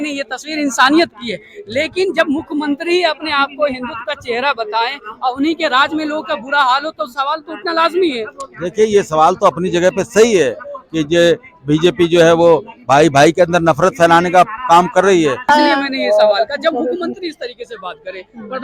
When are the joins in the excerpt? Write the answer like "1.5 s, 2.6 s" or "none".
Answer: 15.4 s